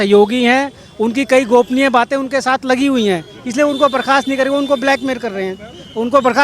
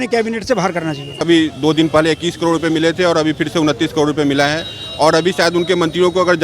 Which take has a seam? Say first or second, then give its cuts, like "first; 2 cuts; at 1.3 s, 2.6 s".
second; 1 cut; at 1.2 s